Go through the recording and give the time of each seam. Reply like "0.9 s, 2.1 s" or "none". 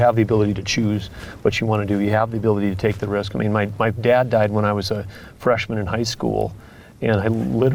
none